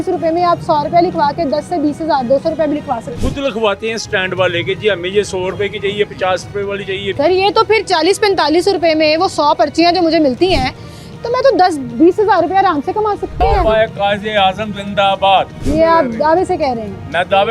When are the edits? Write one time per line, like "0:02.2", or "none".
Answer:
0:03.4
0:07.1
0:13.4
0:15.6